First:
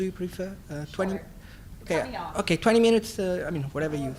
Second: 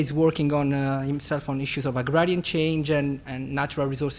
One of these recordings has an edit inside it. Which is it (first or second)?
second